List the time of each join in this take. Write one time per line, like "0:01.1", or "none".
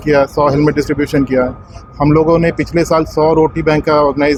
none